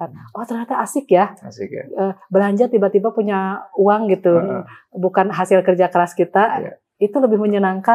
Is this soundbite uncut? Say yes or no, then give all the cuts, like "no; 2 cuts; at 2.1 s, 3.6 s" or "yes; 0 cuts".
yes; 0 cuts